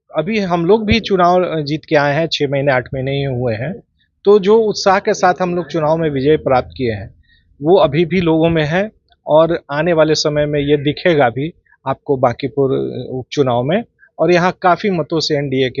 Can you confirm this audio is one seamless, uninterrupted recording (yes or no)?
yes